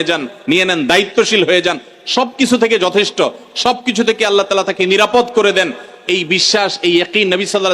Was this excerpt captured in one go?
yes; 0 cuts

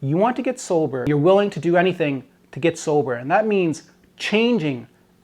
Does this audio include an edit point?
yes; 1 cut; at 1.0 s

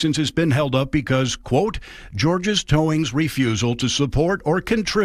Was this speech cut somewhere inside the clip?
no; 0 cuts

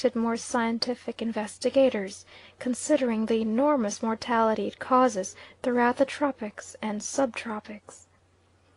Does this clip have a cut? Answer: yes; 1 cut; at 1.4 s

